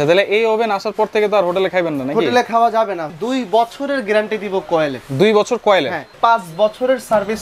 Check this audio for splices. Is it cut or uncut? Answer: cut